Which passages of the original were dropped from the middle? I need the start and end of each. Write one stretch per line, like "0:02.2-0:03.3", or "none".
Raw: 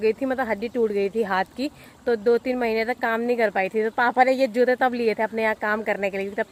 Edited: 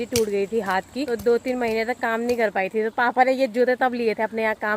0:01.7-0:02.1